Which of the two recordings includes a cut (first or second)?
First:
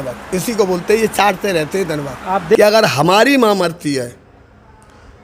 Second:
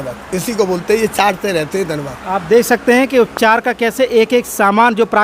first